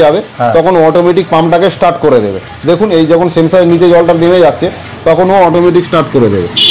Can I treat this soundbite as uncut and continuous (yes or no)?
yes